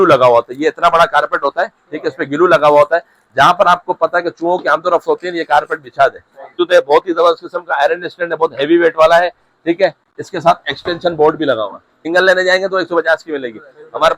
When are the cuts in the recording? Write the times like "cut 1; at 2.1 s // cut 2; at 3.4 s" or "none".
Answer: cut 1; at 6.6 s // cut 2; at 11.9 s

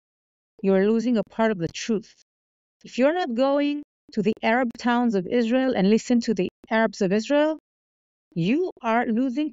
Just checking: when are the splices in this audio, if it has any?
none

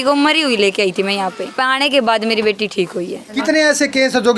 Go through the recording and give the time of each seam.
cut 1; at 1.5 s // cut 2; at 3.3 s

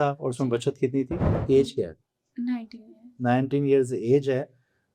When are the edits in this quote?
cut 1; at 1.4 s

